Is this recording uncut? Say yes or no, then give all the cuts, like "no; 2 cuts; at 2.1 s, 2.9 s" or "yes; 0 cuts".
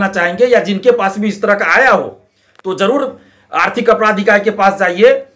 yes; 0 cuts